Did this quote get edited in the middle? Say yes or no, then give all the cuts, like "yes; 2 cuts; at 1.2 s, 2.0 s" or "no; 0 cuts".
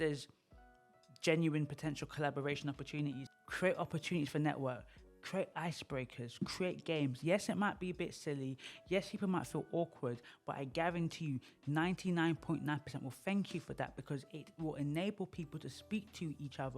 yes; 1 cut; at 3.2 s